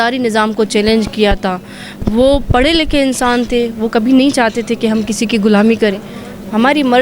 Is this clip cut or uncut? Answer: uncut